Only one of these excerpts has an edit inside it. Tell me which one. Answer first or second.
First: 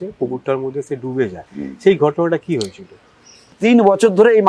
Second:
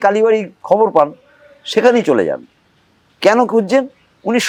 first